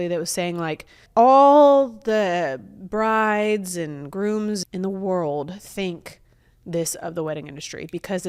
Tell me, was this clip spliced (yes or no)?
yes